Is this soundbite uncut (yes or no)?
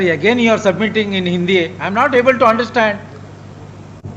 yes